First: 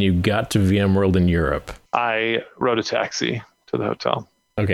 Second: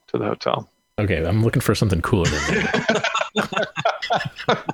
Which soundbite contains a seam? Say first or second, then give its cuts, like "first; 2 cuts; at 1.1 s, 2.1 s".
first; 1 cut; at 1.7 s